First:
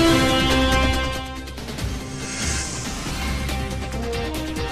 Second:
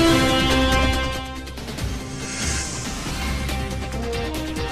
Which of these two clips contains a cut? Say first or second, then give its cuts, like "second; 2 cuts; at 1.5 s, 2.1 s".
second; 3 cuts; at 0.8 s, 2.2 s, 3.4 s